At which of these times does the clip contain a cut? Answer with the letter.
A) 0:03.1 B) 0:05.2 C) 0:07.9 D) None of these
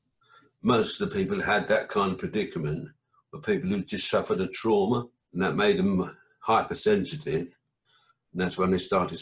B